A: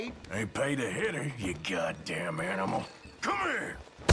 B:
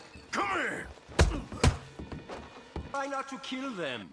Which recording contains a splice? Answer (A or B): B